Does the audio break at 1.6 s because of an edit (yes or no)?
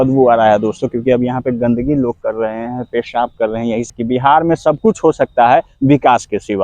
no